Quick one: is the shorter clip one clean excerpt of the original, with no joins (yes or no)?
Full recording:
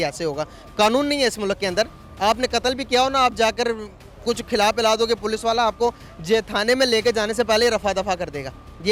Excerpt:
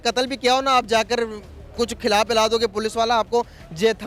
yes